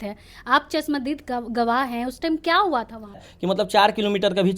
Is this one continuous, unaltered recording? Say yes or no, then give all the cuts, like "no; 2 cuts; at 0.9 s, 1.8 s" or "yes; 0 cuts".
no; 1 cut; at 3.3 s